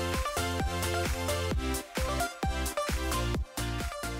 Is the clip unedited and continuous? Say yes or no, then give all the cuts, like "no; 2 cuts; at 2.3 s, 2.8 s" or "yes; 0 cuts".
yes; 0 cuts